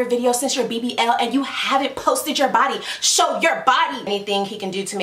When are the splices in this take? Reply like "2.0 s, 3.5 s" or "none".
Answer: 4.1 s